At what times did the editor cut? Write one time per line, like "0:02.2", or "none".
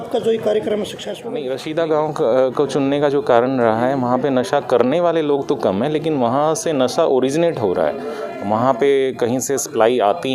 0:01.3